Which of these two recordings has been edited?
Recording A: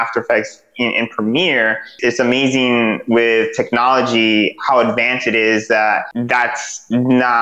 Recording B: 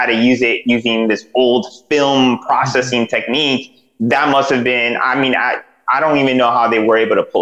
A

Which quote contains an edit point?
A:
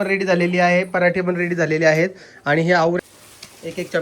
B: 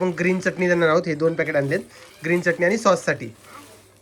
A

